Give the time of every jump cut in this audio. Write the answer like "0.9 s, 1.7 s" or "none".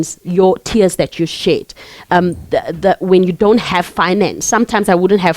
4.4 s